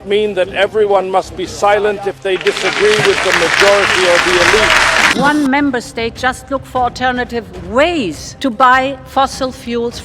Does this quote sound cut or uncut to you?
cut